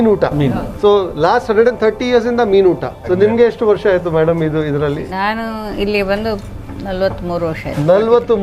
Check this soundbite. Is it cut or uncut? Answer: cut